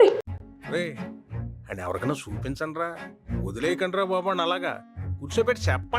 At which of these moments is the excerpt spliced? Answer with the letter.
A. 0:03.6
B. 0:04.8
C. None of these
C